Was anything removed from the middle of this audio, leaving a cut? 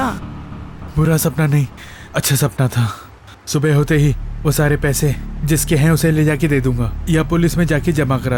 no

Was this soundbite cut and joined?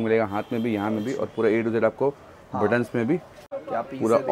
yes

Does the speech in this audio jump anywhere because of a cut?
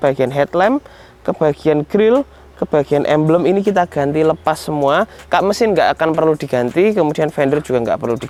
no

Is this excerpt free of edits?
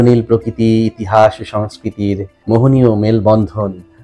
no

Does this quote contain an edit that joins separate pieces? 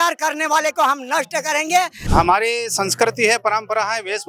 yes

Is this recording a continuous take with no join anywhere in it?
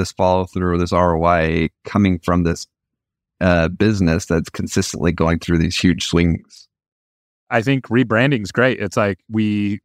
no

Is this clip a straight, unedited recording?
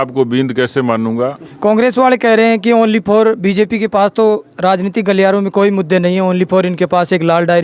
no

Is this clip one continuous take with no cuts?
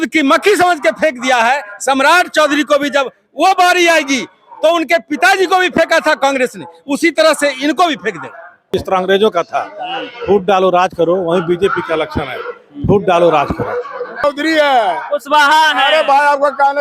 no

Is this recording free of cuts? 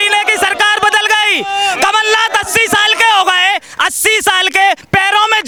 yes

